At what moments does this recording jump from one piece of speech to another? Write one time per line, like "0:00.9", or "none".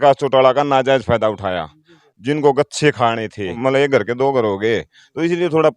0:03.5